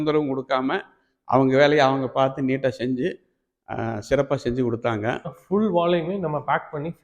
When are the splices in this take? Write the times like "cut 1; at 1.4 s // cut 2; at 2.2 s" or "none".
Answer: cut 1; at 5.3 s